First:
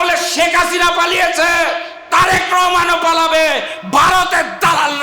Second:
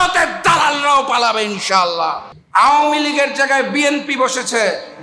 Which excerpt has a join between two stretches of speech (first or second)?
second